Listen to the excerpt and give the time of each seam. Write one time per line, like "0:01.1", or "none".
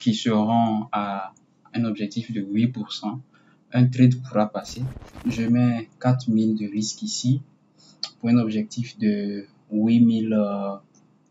0:05.1